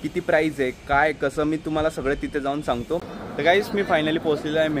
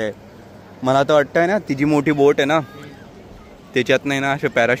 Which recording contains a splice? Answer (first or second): first